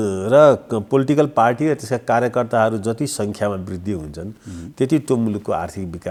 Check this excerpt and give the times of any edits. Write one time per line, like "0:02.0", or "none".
none